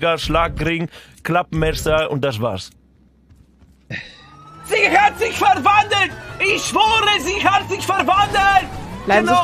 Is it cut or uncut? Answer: cut